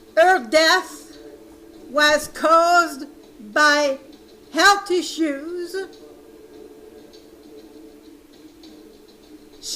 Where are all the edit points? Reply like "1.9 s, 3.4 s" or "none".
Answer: 6.1 s